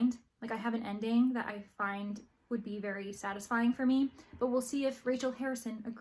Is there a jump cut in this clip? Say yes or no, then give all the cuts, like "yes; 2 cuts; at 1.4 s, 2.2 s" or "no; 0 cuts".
no; 0 cuts